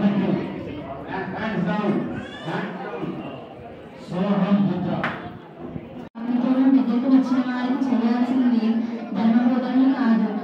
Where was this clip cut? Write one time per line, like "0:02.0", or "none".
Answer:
0:06.1